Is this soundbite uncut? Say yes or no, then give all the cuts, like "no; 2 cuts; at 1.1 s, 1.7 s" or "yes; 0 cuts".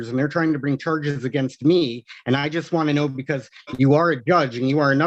yes; 0 cuts